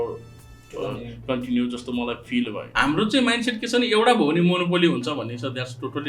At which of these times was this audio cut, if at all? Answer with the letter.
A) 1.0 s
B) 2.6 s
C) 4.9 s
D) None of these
B